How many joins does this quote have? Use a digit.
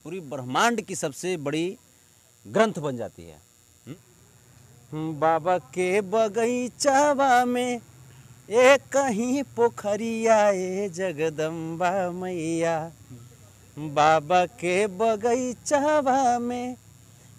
1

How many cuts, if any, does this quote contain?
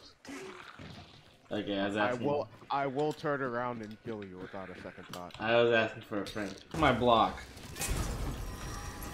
1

